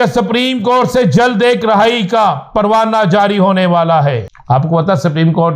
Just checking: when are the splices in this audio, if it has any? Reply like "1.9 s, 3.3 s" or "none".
4.3 s